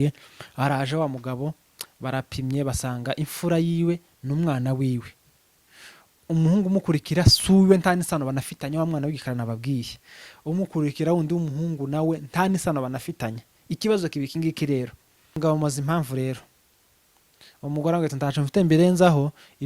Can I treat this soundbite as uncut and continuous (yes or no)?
no